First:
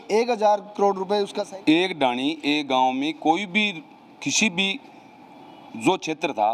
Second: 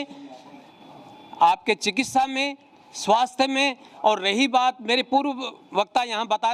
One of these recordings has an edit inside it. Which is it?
first; 1 cut; at 1.4 s

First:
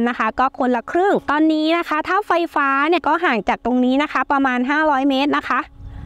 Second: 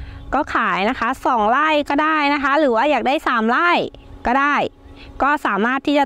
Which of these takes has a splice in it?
first; 2 cuts; at 1.2 s, 3.0 s

